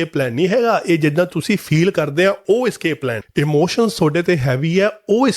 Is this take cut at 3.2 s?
yes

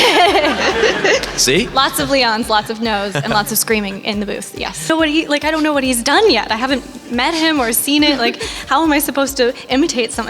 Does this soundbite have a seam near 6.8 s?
no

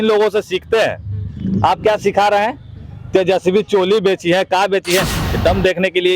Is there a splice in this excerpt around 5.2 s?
yes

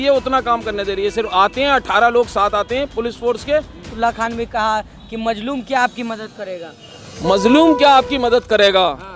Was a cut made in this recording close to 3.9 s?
yes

